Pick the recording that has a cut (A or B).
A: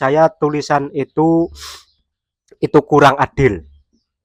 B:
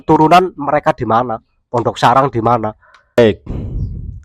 B